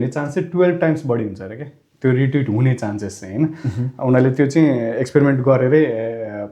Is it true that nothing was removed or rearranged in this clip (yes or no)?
yes